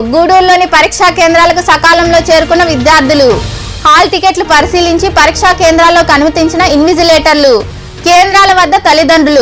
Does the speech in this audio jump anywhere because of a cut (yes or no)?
no